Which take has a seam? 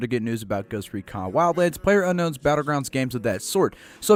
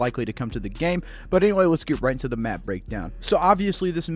second; 1 cut; at 3.2 s

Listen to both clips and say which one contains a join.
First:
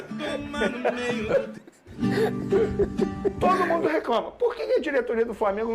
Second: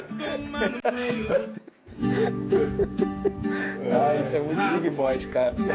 first; 1 cut; at 3.7 s

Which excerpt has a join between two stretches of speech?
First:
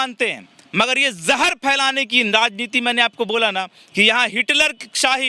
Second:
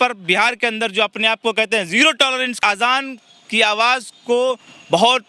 second; 1 cut; at 2.5 s

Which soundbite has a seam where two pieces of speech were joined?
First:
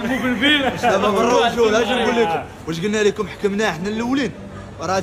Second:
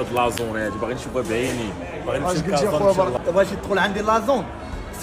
second; 1 cut; at 3.1 s

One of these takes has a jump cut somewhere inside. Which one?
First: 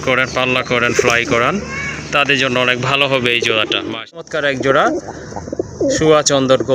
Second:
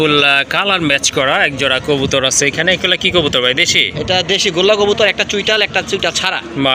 first; 1 cut; at 4.3 s

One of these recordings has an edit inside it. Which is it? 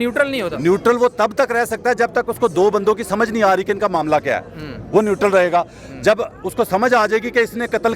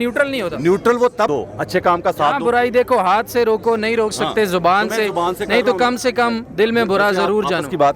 second; 1 cut; at 1.3 s

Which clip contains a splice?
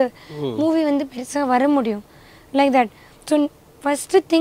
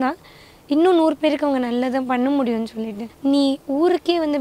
second; 1 cut; at 3.0 s

